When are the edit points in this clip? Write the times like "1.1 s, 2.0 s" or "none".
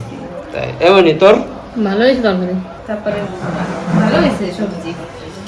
2.8 s